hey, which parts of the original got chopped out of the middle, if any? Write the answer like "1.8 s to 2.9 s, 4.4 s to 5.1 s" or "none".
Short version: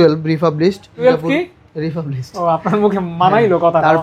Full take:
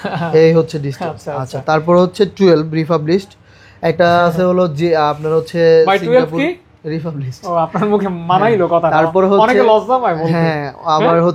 3.4 s to 6.0 s